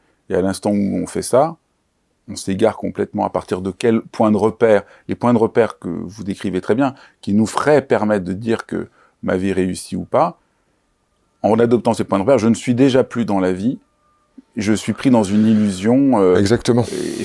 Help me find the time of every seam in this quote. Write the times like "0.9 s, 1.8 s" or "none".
none